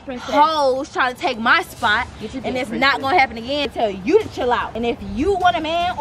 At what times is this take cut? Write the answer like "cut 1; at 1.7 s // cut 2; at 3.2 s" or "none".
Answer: cut 1; at 3.7 s // cut 2; at 4.7 s